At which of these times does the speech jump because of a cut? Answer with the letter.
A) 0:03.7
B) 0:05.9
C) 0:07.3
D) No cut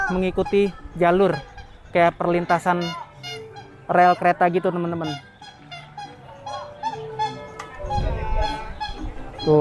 D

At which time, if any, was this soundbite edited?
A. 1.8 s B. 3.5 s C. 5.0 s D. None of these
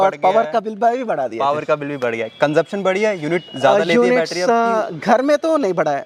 D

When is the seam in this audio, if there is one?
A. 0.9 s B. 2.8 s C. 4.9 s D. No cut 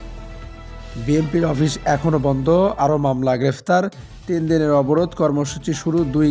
A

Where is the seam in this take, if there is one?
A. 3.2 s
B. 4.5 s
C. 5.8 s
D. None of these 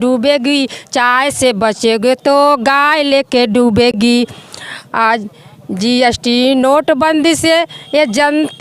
D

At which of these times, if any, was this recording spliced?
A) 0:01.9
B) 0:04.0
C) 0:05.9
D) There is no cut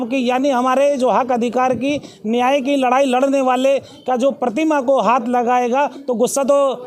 D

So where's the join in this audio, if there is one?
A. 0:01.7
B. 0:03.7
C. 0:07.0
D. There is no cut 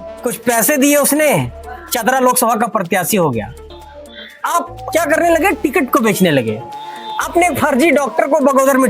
B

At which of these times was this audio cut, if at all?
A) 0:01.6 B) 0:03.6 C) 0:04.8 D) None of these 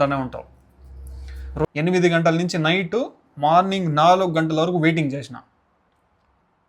A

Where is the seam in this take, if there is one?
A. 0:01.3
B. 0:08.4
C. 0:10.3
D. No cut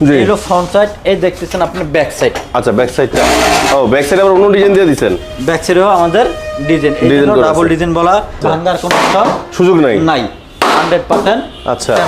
B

